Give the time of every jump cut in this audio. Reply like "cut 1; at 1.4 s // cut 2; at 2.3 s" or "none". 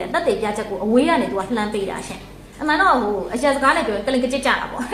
cut 1; at 2.5 s